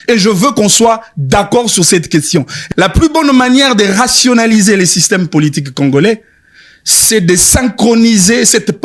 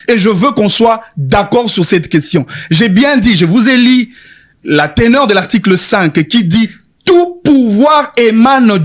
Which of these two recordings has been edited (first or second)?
first